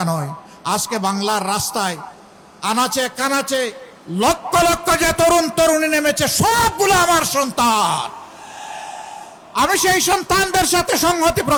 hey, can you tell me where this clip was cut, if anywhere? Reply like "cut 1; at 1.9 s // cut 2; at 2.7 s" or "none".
none